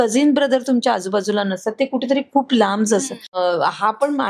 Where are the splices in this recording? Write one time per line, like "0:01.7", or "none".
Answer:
0:03.3